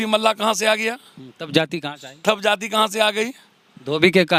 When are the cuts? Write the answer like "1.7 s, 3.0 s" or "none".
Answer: none